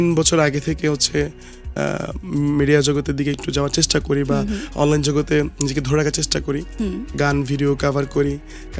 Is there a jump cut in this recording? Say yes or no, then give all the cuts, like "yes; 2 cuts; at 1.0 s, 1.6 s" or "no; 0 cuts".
no; 0 cuts